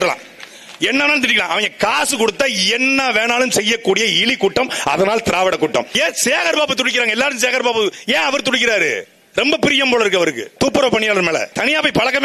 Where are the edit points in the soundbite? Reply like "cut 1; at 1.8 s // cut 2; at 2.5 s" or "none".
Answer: cut 1; at 5.9 s // cut 2; at 9.2 s // cut 3; at 10.4 s // cut 4; at 11.5 s